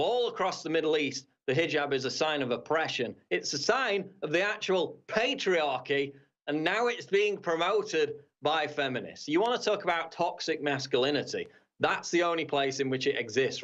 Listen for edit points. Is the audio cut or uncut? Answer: uncut